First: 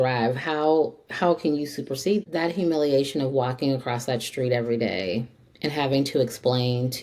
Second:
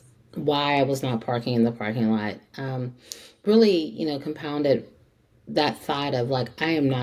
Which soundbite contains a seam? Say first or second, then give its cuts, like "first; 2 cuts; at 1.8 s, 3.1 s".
first; 1 cut; at 2.3 s